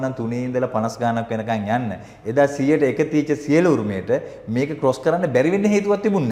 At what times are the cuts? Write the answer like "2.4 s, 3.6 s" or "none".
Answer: none